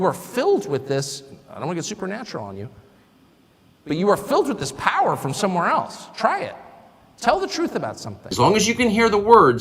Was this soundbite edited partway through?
yes; 1 cut; at 8.3 s

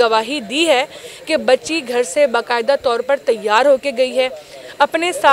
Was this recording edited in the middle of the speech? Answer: no; 0 cuts

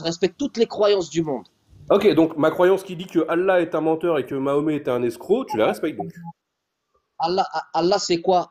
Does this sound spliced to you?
no; 0 cuts

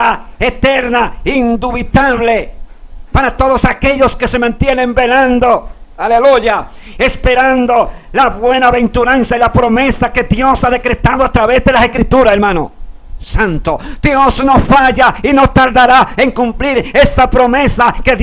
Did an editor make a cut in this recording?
no; 0 cuts

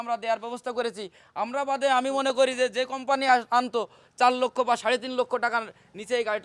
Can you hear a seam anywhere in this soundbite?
no; 0 cuts

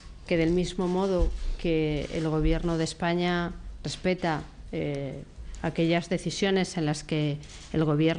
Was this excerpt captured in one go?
no; 1 cut; at 4.0 s

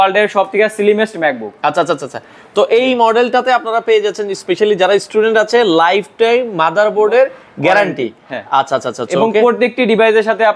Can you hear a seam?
no; 0 cuts

